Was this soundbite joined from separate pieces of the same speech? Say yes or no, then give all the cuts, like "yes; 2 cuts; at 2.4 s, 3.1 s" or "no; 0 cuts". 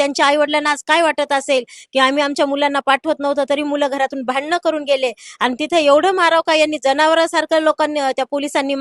no; 0 cuts